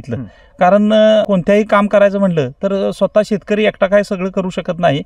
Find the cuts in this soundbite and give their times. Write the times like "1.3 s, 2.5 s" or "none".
1.3 s